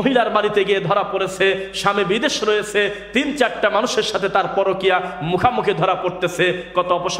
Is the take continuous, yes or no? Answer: yes